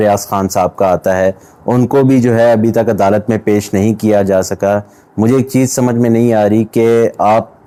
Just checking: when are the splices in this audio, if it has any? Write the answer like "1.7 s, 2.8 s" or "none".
none